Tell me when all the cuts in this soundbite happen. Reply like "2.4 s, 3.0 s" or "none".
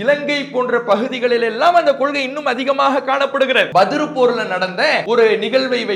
3.7 s, 5.0 s